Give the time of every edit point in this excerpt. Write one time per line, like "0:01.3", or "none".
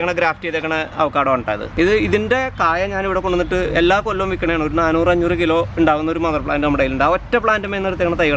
0:01.7

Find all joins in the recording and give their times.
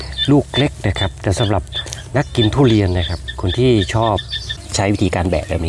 0:04.6

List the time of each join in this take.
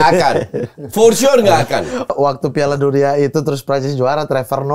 0:02.1

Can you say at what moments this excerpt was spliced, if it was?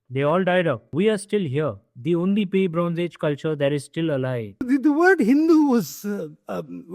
0:00.9
0:04.6

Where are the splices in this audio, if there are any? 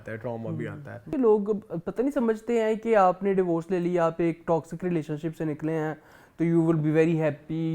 0:01.0

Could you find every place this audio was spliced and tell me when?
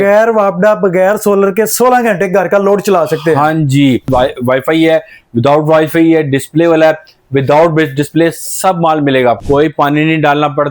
0:04.1
0:09.4

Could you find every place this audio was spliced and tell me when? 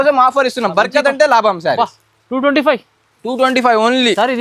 none

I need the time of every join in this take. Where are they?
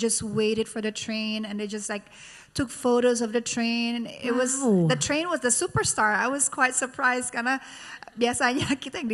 none

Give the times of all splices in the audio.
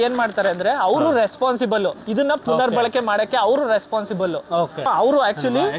0:04.9

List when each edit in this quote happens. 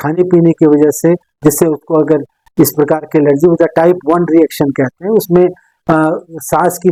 none

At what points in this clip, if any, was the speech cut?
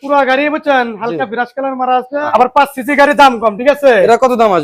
0:02.3

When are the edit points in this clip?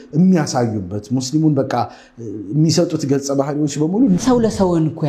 0:04.2

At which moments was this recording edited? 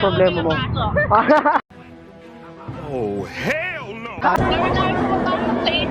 0:00.9
0:04.4

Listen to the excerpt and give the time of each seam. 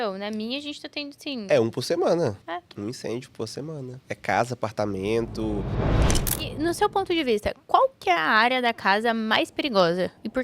0:02.4
0:04.0
0:06.0

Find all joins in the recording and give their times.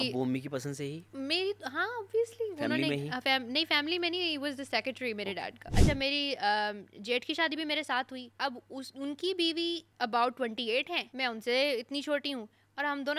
0:01.0
0:05.7
0:08.2
0:09.9
0:11.0

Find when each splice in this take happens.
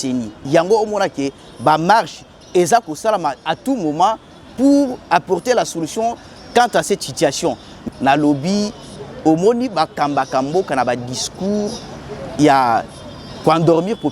0:07.7

